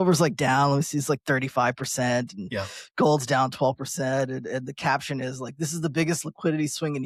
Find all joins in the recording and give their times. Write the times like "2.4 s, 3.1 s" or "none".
none